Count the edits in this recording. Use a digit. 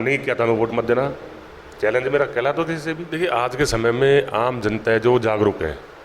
1